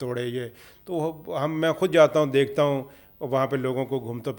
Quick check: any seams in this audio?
no; 0 cuts

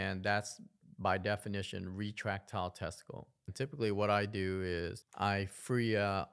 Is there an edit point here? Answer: yes; 2 cuts; at 3.5 s, 5.0 s

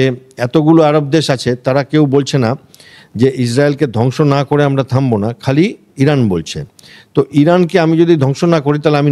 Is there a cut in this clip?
no; 0 cuts

